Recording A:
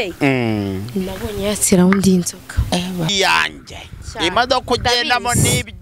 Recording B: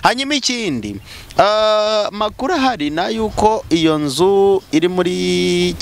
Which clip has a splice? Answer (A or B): A